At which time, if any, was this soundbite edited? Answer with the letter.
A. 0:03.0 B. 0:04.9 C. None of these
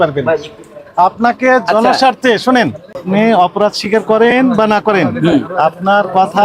A